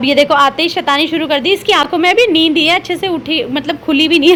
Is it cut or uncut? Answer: uncut